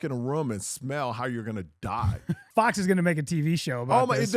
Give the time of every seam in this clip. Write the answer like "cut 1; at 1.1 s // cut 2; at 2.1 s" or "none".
cut 1; at 2.5 s